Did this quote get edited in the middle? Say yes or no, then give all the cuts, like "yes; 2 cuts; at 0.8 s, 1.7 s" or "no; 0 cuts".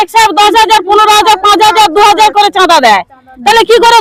no; 0 cuts